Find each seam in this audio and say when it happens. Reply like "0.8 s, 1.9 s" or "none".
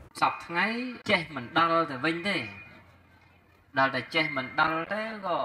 1.0 s